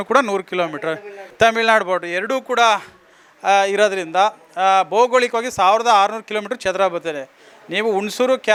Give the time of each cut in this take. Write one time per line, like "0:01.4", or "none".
none